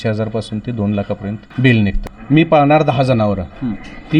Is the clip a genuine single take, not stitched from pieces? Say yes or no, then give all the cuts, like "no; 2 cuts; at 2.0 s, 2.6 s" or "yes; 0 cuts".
no; 2 cuts; at 1.4 s, 2.0 s